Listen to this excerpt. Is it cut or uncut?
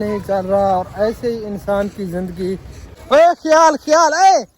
cut